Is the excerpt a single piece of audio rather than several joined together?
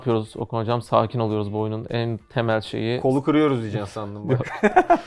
yes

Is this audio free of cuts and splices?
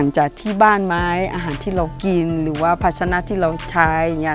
yes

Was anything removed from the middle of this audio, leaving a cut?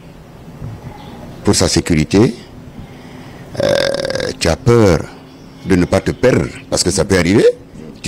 no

